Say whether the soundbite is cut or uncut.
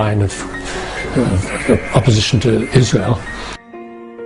uncut